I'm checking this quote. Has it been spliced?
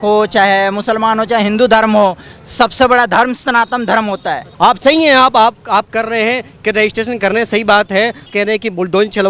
yes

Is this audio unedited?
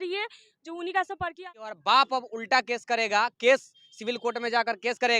no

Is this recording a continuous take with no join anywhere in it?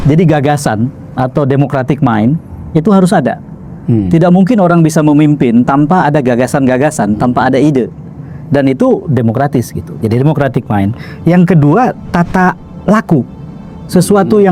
yes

